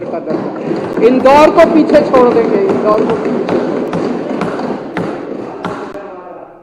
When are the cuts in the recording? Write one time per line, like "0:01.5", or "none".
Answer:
none